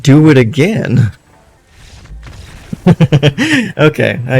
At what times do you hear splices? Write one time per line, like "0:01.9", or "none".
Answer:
0:01.6